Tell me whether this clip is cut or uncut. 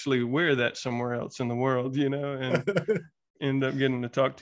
uncut